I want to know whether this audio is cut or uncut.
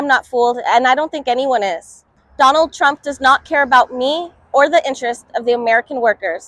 uncut